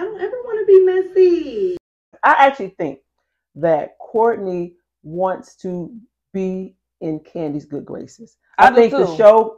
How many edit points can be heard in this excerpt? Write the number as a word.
one